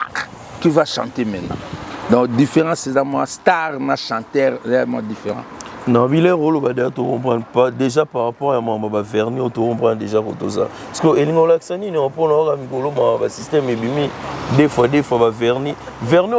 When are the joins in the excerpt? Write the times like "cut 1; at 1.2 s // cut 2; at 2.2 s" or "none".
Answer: none

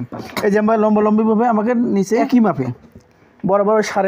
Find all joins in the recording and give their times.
cut 1; at 2.2 s

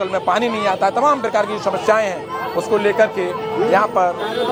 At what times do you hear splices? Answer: none

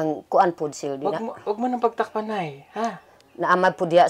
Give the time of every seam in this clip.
none

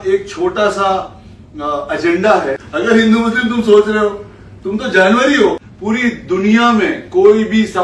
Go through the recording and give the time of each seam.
cut 1; at 2.6 s // cut 2; at 5.7 s

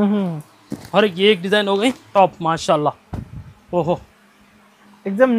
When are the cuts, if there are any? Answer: cut 1; at 2.1 s

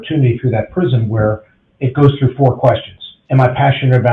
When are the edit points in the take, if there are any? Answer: cut 1; at 3.2 s

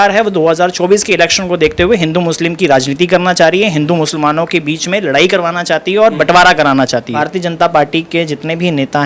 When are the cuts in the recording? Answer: cut 1; at 7.2 s

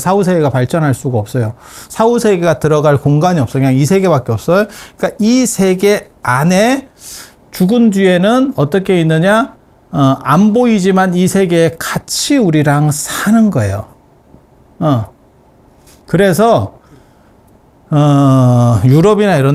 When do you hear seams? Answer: none

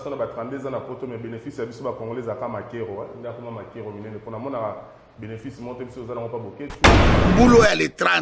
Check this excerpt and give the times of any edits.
cut 1; at 7.0 s

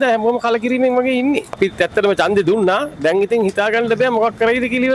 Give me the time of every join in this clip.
cut 1; at 1.6 s

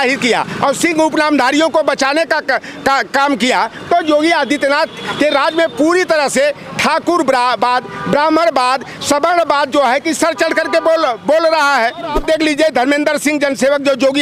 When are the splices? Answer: cut 1; at 12.2 s

